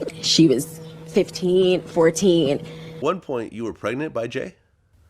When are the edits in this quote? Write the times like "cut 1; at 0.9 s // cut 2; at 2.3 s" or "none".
cut 1; at 3.0 s